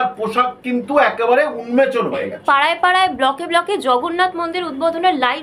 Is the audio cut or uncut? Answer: uncut